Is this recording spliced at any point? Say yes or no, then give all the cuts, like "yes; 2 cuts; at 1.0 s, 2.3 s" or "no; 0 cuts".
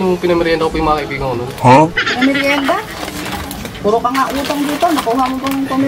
no; 0 cuts